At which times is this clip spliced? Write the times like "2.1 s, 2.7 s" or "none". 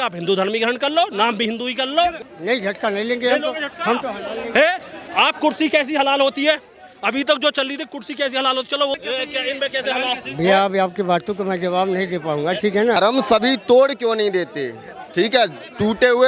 2.2 s, 8.9 s